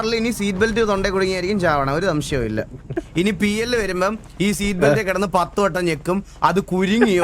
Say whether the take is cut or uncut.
cut